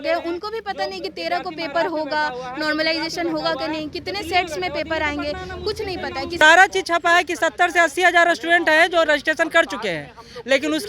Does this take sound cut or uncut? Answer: cut